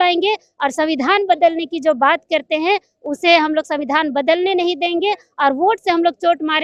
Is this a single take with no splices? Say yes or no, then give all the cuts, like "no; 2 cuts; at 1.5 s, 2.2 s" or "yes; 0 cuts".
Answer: yes; 0 cuts